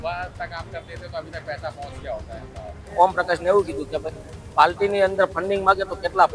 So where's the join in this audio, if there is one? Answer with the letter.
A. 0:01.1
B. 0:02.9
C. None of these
B